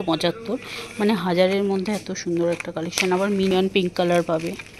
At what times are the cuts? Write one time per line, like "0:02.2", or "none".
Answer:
0:03.7

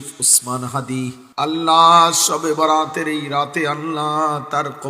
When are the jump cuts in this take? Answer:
0:01.4

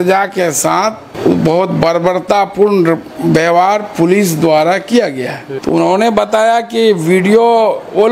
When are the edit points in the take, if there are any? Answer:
0:01.1
0:05.4

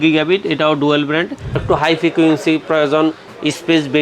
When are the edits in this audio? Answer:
0:01.6

